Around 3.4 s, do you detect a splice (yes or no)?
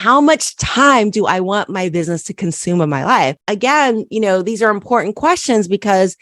yes